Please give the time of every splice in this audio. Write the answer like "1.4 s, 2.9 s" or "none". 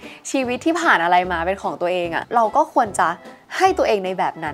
2.2 s